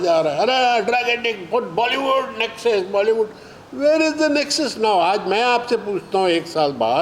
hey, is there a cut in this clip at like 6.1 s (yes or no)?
no